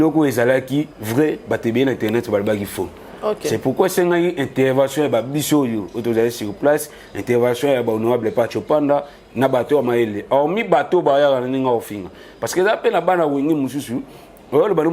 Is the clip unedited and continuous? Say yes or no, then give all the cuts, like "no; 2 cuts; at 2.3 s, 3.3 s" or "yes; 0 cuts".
yes; 0 cuts